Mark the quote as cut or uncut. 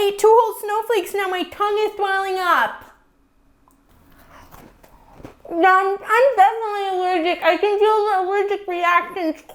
uncut